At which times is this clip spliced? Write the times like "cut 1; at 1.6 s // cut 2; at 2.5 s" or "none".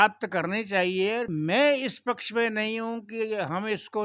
cut 1; at 1.3 s